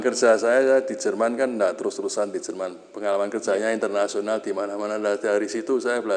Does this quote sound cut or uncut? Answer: uncut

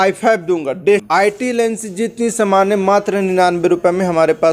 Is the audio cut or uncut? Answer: cut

